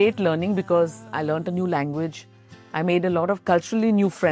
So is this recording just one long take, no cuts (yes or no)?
no